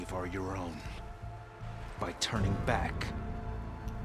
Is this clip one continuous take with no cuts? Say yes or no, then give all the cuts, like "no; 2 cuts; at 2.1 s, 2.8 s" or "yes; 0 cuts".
yes; 0 cuts